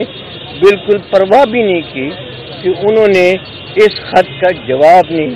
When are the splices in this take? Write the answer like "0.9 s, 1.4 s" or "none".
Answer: none